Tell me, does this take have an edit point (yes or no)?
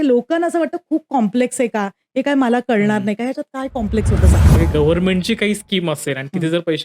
yes